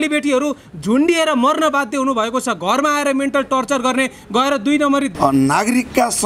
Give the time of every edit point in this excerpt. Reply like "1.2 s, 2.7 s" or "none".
5.1 s